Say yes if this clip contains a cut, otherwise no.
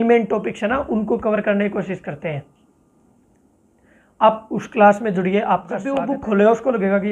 yes